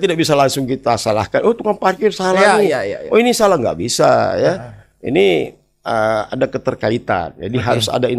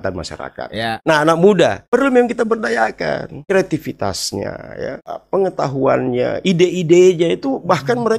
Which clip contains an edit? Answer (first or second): second